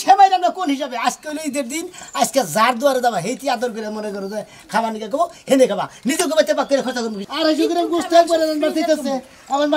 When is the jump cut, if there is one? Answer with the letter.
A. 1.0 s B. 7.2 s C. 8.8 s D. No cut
B